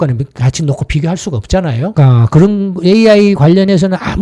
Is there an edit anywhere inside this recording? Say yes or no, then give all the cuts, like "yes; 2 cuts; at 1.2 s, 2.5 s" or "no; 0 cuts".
no; 0 cuts